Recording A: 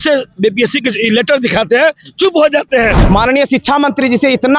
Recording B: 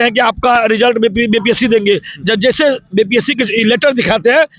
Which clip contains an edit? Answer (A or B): A